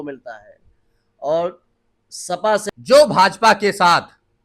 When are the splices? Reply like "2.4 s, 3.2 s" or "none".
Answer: 2.6 s